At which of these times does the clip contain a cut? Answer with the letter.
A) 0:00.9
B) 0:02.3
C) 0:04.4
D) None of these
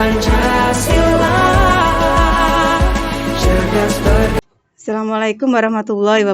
C